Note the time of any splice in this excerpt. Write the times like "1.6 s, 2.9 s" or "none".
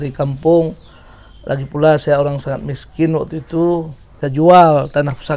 4.2 s